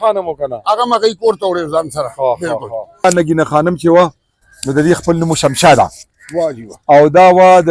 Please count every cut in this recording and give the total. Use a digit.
1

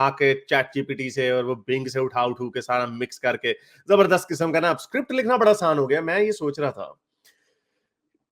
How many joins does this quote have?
0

